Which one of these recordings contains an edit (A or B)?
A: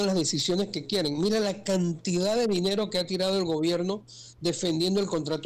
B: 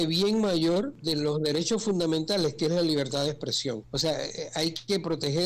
B